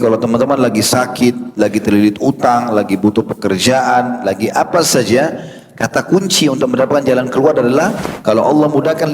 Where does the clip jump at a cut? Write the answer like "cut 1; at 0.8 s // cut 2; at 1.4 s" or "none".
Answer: cut 1; at 8.0 s

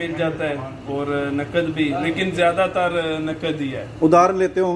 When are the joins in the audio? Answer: none

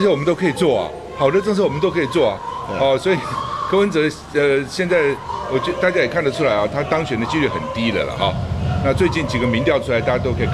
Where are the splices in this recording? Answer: none

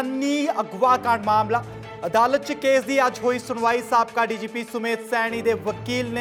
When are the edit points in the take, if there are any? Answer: none

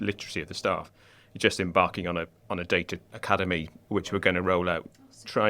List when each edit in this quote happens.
cut 1; at 2.5 s // cut 2; at 3.8 s

